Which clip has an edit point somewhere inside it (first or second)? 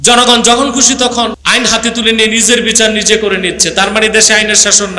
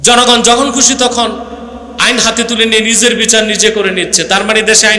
first